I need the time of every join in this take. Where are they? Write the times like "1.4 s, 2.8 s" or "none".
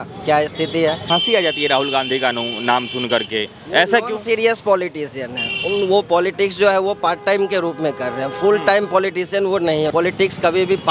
1.0 s, 9.9 s